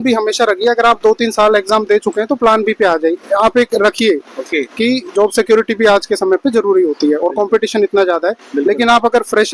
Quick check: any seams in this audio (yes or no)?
no